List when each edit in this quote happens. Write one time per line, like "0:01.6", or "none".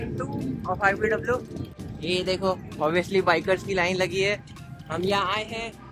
none